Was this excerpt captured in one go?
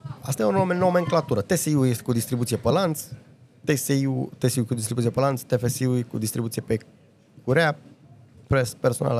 yes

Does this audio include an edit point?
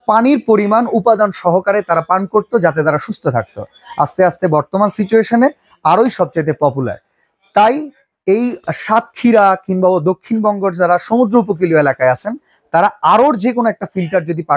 no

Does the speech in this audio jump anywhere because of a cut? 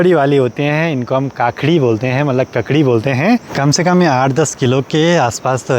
yes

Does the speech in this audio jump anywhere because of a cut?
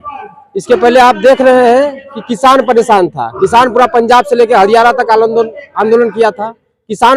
no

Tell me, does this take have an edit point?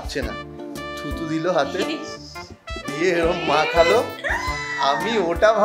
no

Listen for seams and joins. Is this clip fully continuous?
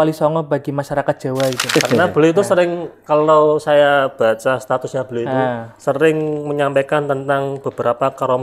no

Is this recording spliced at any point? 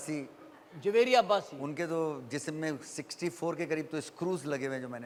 no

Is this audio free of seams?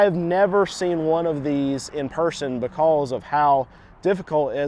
yes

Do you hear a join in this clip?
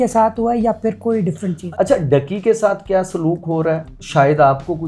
yes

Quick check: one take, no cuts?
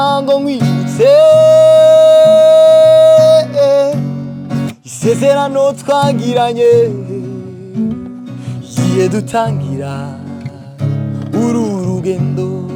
yes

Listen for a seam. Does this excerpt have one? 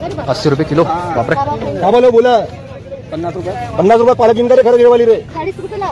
no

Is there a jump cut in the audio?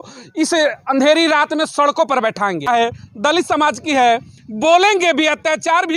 yes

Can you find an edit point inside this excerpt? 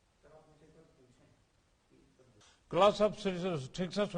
yes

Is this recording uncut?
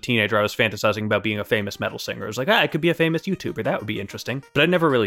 yes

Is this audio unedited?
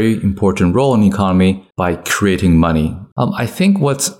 no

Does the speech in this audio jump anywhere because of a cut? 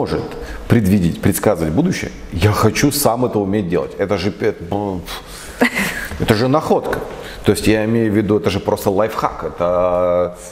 no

